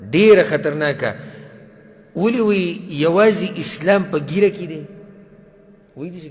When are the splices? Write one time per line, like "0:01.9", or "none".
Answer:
none